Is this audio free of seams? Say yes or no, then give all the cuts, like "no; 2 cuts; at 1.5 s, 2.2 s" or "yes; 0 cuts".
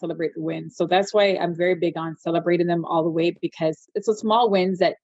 no; 1 cut; at 3.9 s